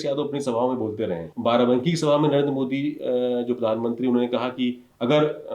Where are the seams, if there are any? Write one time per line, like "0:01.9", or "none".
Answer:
0:01.2